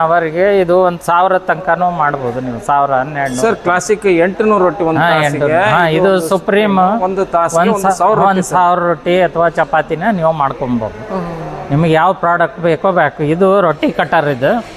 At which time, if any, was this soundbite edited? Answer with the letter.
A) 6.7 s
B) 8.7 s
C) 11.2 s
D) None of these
D